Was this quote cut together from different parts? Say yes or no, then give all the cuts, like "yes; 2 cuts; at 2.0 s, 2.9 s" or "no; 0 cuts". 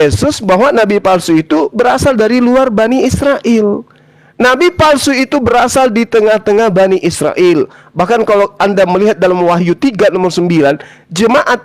no; 0 cuts